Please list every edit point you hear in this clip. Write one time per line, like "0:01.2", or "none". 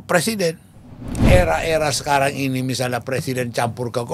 0:01.2

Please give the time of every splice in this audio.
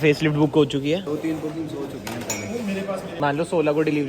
0:01.1
0:03.1

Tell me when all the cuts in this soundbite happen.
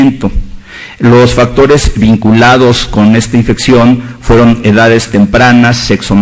none

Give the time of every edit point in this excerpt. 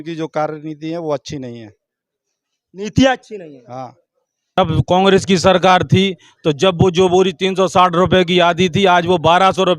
0:04.6

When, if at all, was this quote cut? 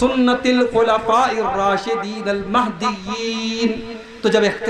none

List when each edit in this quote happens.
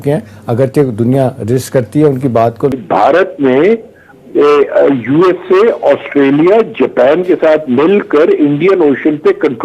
0:02.8

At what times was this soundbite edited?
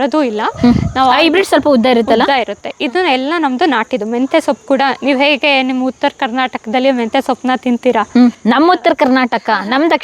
none

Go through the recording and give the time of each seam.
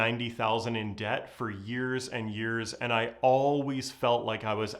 0:02.7

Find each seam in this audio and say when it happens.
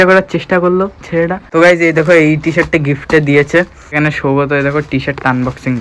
0:01.5
0:03.8

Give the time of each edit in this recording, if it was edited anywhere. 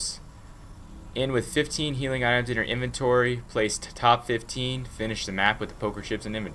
none

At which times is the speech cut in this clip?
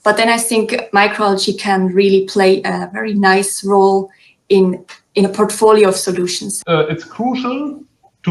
0:06.5

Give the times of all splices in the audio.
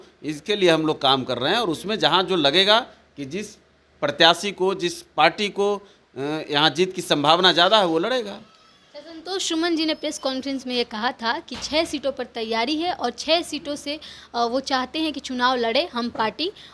none

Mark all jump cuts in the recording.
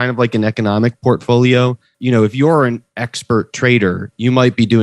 0:01.9

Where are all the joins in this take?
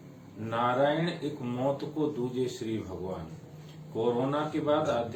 none

